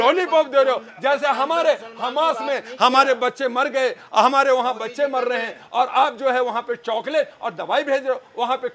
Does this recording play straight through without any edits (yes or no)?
yes